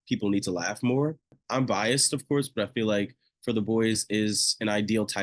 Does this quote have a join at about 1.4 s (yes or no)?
yes